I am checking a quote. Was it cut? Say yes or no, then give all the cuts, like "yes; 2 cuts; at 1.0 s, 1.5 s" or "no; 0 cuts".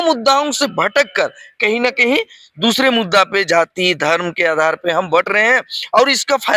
no; 0 cuts